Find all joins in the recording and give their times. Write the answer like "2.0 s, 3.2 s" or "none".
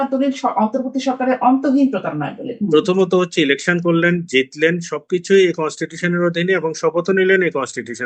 2.5 s